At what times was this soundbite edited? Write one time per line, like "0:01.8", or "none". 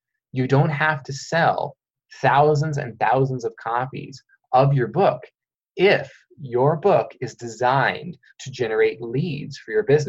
none